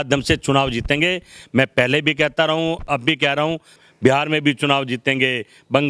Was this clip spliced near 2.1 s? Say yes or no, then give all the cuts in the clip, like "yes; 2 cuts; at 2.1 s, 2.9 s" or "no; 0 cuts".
no; 1 cut; at 3.7 s